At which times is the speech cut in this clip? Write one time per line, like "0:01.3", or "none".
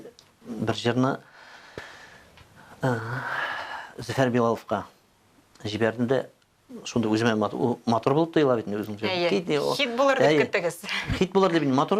none